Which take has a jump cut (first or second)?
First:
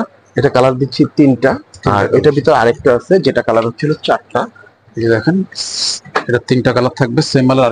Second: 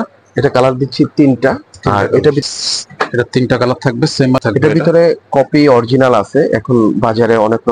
second